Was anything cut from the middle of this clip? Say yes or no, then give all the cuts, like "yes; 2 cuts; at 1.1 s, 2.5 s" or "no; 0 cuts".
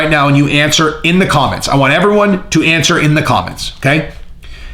no; 0 cuts